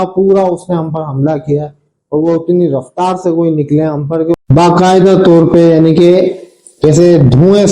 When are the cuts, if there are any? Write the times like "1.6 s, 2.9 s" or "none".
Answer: 4.4 s